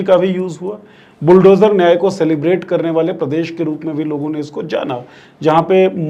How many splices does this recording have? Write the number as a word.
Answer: zero